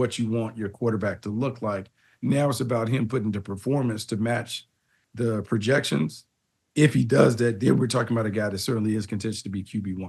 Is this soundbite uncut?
yes; 0 cuts

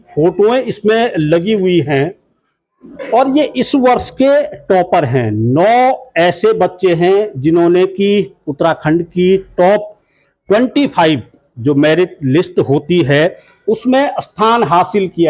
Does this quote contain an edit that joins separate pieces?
no; 0 cuts

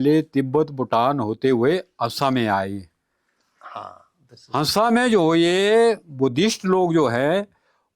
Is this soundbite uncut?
yes; 0 cuts

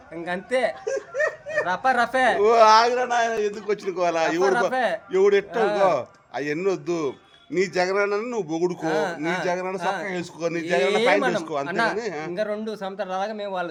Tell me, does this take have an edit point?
no; 0 cuts

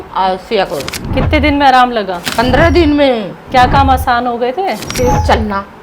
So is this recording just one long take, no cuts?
no; 4 cuts; at 1.0 s, 2.2 s, 3.4 s, 4.8 s

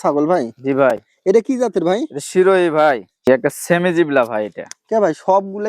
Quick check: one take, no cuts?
no; 1 cut; at 3.3 s

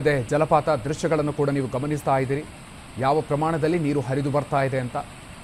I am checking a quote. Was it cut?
no; 0 cuts

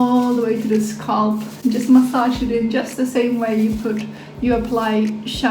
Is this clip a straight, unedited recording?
yes; 0 cuts

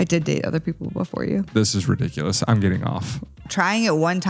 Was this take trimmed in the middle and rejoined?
yes; 2 cuts; at 1.5 s, 3.4 s

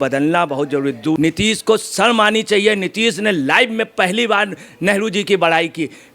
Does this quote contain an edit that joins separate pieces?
yes; 1 cut; at 1.2 s

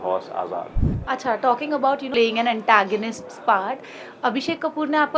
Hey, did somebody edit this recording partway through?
yes; 2 cuts; at 0.9 s, 2.1 s

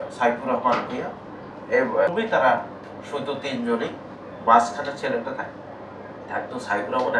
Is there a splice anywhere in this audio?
yes; 1 cut; at 2.1 s

